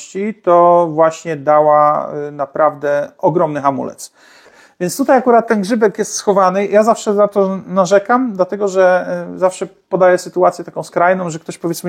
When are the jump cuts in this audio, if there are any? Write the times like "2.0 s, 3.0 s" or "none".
4.6 s